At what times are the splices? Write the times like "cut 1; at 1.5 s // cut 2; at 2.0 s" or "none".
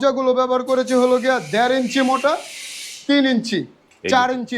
none